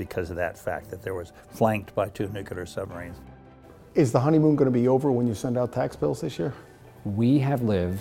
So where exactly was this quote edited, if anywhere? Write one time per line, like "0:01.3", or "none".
0:03.2
0:06.7